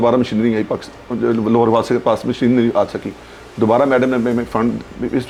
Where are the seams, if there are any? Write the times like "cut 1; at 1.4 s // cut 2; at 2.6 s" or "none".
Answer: none